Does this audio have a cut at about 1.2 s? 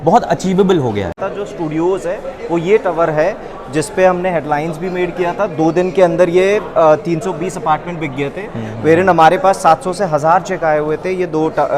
yes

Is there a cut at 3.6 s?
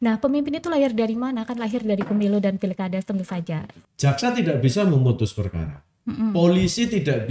yes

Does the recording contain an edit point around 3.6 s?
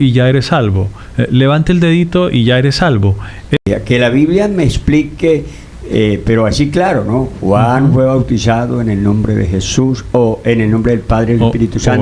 yes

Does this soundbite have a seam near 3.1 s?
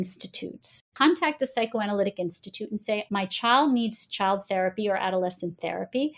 yes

